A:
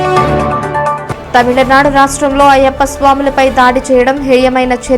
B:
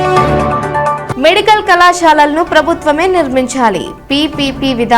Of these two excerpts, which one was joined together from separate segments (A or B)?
A